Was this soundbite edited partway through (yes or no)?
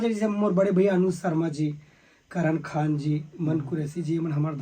no